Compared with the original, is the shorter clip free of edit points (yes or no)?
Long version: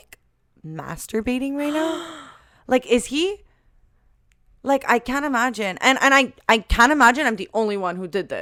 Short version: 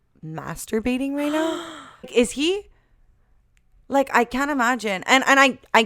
no